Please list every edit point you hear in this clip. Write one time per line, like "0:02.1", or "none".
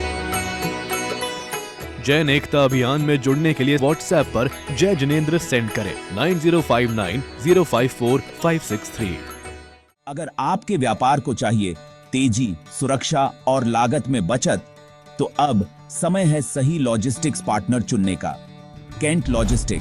0:01.7
0:09.8